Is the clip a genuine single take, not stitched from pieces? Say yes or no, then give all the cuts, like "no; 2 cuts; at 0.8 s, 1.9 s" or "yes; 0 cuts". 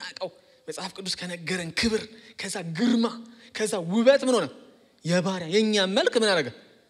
yes; 0 cuts